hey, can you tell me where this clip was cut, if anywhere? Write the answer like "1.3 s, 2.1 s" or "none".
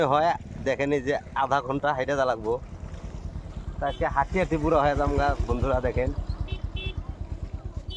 none